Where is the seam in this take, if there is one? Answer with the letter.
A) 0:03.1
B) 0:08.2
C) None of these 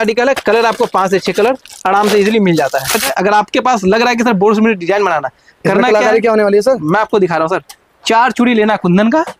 A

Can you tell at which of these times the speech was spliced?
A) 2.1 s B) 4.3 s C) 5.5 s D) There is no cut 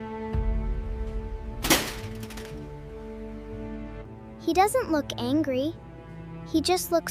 B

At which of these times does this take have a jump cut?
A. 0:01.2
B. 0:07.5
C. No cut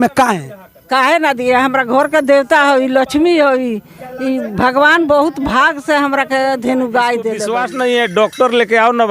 B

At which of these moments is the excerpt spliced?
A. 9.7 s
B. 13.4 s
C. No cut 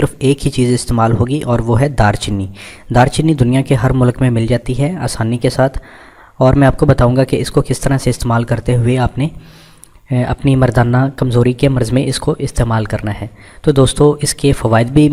B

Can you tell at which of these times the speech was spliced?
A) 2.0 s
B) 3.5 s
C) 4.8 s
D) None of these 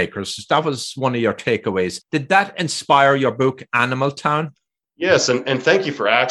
A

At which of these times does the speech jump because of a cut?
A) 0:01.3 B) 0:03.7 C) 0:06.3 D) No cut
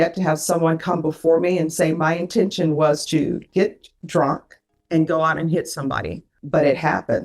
C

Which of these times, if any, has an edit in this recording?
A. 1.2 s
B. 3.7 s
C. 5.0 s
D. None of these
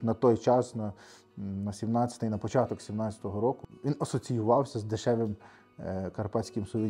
B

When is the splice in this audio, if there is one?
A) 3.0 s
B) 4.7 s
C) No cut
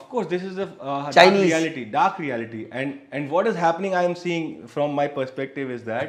C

